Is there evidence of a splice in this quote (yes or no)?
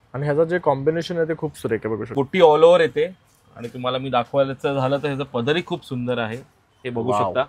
yes